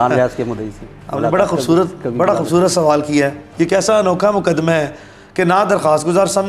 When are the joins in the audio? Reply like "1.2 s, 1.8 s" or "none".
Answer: 3.5 s